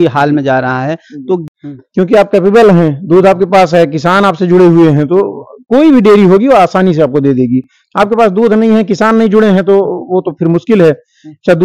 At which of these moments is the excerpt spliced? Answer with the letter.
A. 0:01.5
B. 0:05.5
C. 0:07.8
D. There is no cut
A